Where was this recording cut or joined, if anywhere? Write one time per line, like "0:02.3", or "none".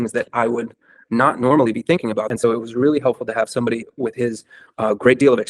0:02.3